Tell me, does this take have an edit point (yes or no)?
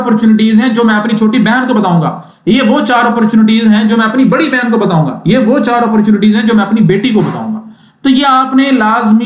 no